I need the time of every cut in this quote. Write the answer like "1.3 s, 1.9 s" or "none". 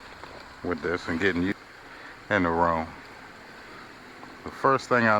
1.5 s

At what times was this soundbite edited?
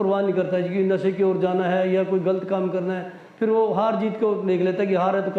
none

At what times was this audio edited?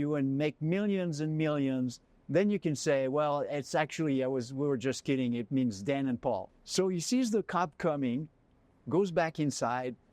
6.6 s

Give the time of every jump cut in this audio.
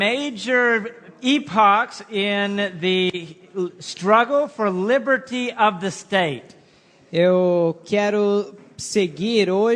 6.4 s

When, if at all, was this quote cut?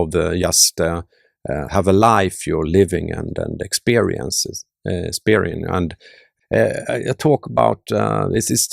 6.3 s

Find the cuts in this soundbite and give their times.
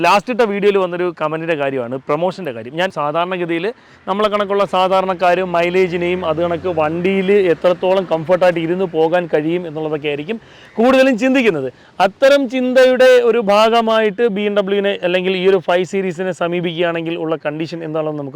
2.9 s

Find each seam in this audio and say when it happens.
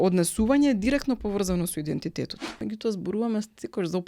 2.6 s

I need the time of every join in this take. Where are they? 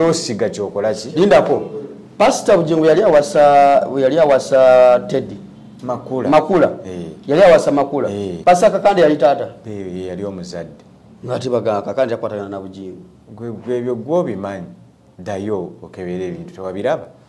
8.3 s

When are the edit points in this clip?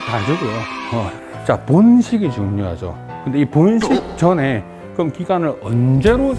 1.2 s

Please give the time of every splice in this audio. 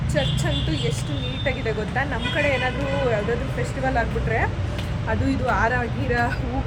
none

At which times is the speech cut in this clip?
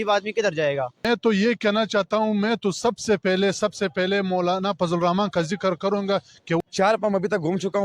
1.0 s, 6.6 s

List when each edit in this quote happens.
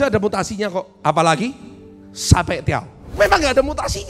3.0 s

